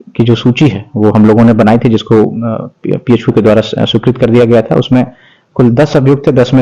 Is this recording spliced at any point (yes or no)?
no